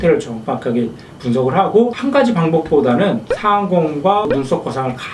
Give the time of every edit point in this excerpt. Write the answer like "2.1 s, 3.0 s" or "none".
2.0 s, 3.3 s